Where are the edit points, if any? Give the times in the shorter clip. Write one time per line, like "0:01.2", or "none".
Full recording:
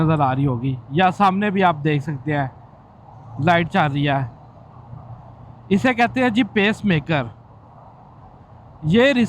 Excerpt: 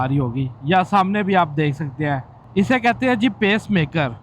0:02.4